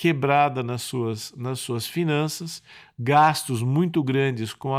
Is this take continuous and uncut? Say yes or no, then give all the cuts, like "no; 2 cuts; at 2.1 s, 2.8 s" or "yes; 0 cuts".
yes; 0 cuts